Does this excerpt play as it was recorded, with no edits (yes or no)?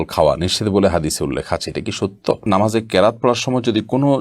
no